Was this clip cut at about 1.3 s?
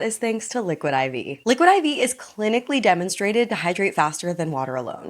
yes; 1 cut; at 1.3 s

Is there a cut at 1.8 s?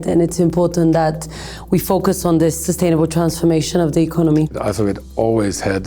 no; 1 cut; at 4.6 s

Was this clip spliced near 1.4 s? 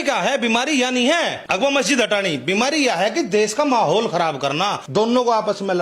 yes; 2 cuts; at 1.4 s, 4.8 s

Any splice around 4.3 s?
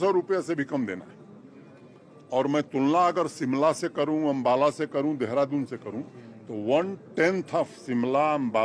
no; 0 cuts

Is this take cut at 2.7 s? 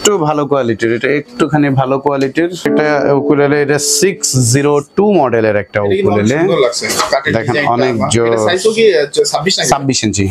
yes; 1 cut; at 2.7 s

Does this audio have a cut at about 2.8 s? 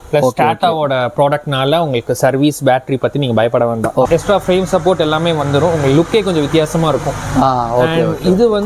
no; 1 cut; at 4.1 s

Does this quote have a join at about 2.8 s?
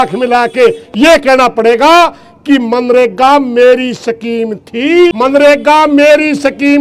no; 1 cut; at 5.1 s

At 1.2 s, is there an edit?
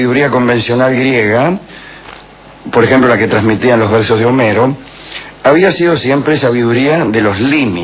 yes; 1 cut; at 1.2 s

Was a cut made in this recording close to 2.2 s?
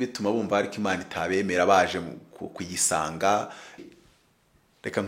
no; 1 cut; at 3.8 s

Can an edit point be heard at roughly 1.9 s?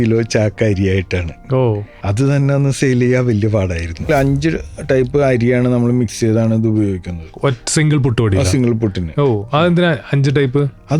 yes; 2 cuts; at 1.9 s, 4.1 s

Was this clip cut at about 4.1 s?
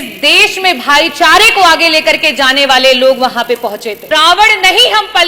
yes; 1 cut; at 4.1 s

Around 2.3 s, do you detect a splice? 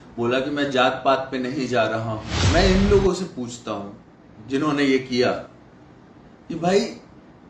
yes; 1 cut; at 2.3 s

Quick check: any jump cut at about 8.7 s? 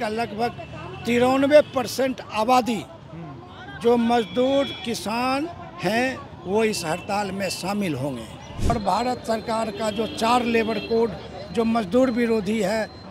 yes; 1 cut; at 8.7 s

